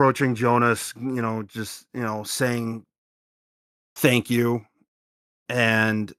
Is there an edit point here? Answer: no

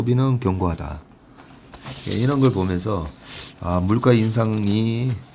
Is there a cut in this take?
no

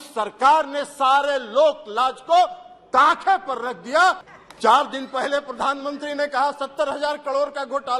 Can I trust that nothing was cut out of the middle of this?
no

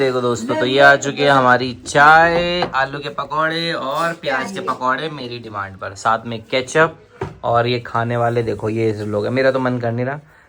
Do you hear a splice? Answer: no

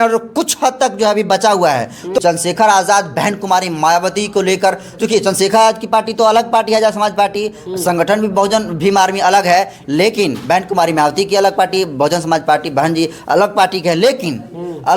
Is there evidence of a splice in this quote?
yes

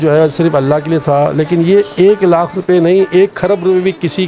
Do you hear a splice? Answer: no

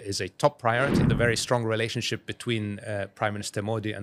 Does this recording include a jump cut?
yes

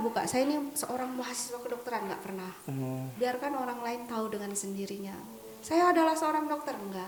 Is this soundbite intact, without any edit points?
yes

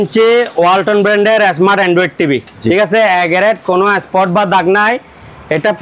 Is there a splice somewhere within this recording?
no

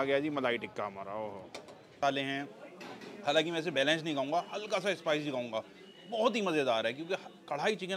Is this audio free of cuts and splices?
no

